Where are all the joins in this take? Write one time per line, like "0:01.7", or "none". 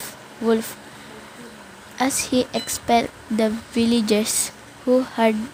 none